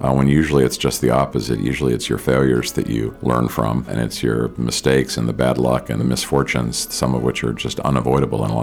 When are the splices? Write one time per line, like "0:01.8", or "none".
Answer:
0:03.1
0:03.9
0:06.0